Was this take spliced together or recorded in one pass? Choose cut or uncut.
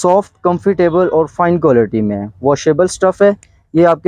uncut